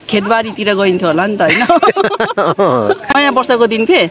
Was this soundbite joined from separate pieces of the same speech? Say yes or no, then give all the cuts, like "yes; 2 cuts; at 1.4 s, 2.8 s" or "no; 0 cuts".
yes; 1 cut; at 3.1 s